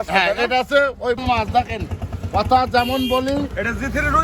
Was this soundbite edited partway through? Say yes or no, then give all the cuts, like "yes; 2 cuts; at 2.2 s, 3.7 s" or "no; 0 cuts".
yes; 1 cut; at 1.2 s